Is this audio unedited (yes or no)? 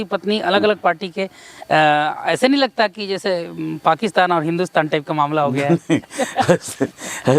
yes